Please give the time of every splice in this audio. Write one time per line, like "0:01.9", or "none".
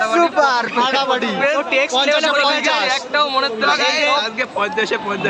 none